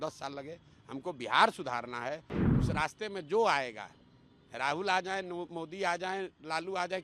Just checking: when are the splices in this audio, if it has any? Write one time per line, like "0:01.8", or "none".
0:02.4